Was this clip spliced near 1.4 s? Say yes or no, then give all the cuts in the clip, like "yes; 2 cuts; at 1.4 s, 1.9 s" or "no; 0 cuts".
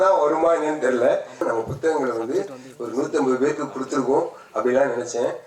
yes; 1 cut; at 1.4 s